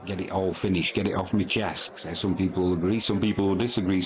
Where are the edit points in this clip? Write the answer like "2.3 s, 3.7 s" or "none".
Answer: 1.9 s